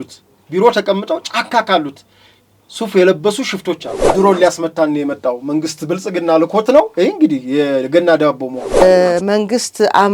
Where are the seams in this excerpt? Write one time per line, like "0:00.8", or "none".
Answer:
0:04.1
0:08.8